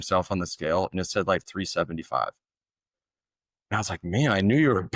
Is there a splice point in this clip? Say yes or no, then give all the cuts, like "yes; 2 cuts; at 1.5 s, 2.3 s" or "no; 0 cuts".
no; 0 cuts